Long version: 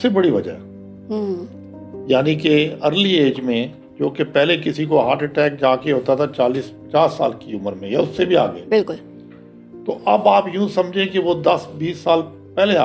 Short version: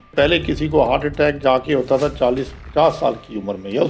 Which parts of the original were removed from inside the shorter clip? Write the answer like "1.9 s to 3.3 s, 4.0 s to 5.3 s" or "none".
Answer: none